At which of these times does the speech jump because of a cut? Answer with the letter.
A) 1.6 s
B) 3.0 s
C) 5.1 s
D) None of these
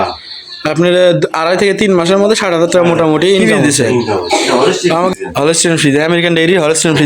C